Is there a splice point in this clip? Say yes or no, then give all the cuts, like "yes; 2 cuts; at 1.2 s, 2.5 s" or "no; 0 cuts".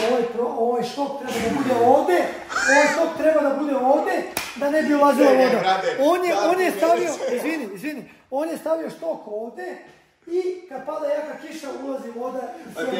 no; 0 cuts